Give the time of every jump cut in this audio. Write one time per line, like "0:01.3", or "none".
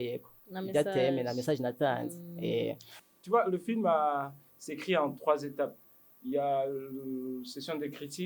0:02.9